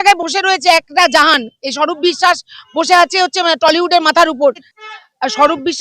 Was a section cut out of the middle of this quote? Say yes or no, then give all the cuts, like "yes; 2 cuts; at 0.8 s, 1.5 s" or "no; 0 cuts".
yes; 1 cut; at 4.7 s